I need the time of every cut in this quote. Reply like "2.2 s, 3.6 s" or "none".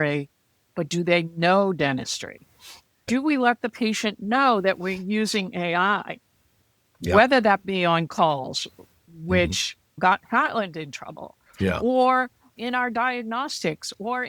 3.1 s, 6.9 s, 10.0 s